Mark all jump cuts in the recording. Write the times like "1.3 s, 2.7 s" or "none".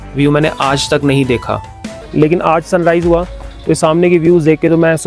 1.9 s